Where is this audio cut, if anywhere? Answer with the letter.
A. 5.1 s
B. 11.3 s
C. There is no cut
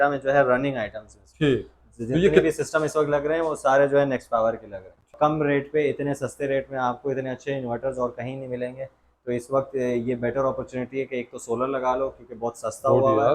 A